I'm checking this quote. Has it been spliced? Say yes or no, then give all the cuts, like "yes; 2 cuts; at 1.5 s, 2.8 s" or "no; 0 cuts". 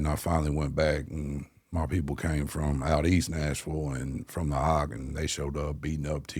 no; 0 cuts